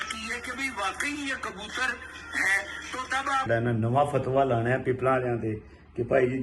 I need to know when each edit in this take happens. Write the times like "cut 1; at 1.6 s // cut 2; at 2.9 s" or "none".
cut 1; at 3.5 s